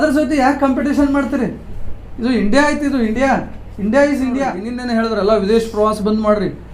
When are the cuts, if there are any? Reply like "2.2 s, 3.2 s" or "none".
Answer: 4.7 s